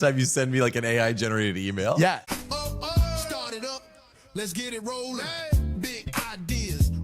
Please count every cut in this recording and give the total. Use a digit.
1